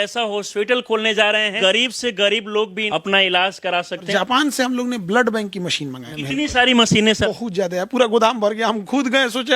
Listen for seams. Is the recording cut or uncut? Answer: cut